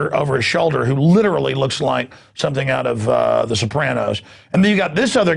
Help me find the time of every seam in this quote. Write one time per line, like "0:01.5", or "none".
0:01.4